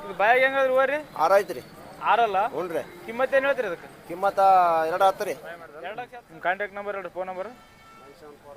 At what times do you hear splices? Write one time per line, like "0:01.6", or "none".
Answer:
0:05.8